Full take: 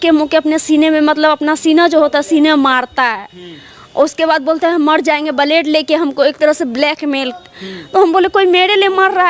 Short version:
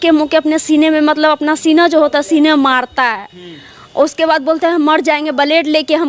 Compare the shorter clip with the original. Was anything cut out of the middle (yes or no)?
no